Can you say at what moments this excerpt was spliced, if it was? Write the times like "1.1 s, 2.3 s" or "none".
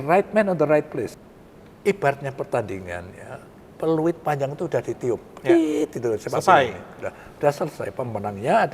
1.2 s

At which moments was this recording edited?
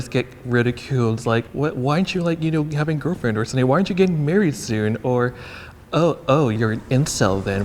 1.5 s, 6.6 s

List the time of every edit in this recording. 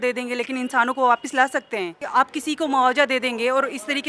2.0 s

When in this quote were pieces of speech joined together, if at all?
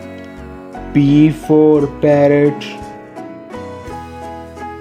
0.9 s

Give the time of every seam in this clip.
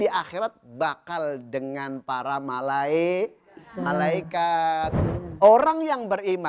4.9 s

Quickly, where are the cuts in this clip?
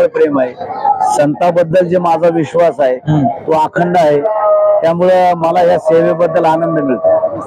none

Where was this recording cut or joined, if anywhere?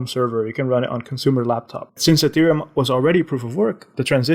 2.0 s

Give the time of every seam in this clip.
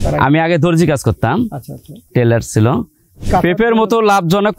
3.2 s

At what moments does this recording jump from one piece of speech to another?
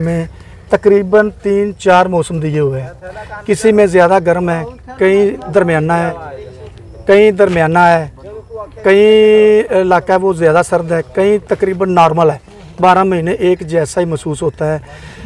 none

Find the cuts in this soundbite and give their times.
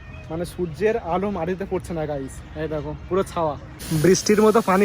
3.7 s

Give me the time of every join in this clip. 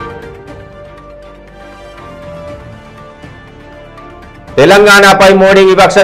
4.0 s

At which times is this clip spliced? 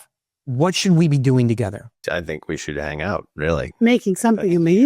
1.9 s

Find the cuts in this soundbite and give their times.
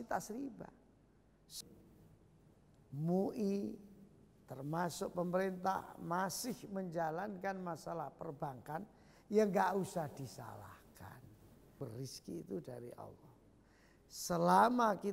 1.5 s, 11.8 s

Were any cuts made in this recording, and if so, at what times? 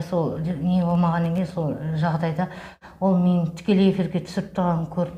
2.8 s

